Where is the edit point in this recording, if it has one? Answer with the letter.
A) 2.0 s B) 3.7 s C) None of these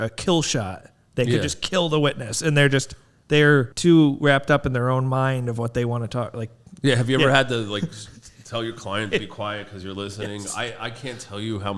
B